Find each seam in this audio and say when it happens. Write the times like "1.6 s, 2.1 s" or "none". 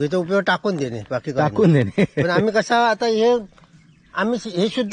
none